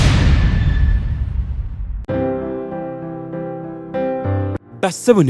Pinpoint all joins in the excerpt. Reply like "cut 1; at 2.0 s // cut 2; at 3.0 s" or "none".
cut 1; at 2.0 s